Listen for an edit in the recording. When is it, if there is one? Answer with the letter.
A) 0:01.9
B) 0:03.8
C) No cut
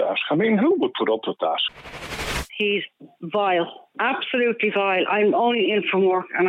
A